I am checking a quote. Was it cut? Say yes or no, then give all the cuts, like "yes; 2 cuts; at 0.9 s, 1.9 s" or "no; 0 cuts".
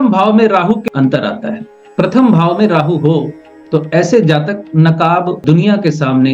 yes; 2 cuts; at 0.8 s, 5.4 s